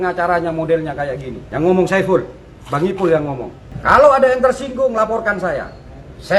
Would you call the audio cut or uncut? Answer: cut